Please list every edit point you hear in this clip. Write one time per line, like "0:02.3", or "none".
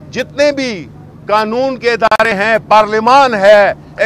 none

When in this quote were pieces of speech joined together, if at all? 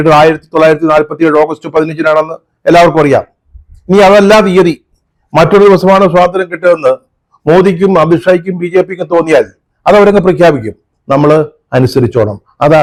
none

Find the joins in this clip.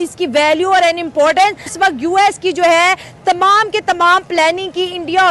0:01.7

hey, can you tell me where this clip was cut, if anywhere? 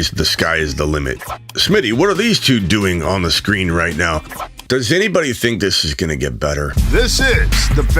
0:01.2
0:04.4
0:06.8

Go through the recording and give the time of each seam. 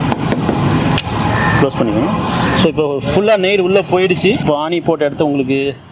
none

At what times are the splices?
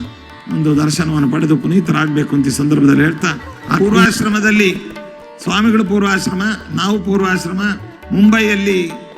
0:03.8

